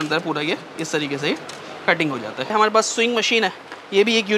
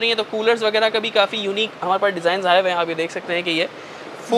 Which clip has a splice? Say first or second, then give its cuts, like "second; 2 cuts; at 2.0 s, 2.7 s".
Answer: first; 1 cut; at 2.5 s